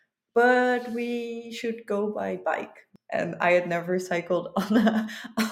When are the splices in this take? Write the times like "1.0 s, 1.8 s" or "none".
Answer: 2.9 s